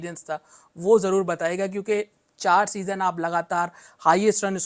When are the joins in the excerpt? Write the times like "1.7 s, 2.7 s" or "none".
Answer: none